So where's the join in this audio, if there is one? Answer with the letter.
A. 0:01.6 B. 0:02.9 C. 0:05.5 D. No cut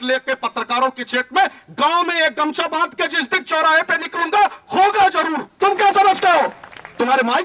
C